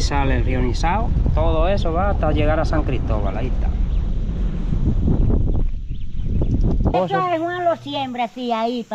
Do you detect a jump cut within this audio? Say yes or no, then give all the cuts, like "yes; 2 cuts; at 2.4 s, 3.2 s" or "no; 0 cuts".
yes; 1 cut; at 6.9 s